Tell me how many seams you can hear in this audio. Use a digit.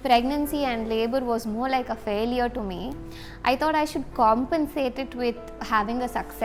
0